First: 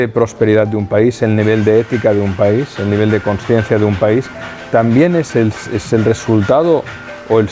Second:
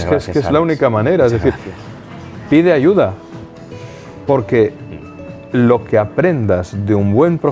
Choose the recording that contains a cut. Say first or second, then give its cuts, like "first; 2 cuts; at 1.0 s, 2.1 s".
second; 1 cut; at 1.7 s